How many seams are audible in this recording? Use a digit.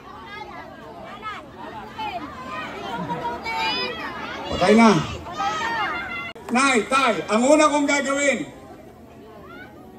1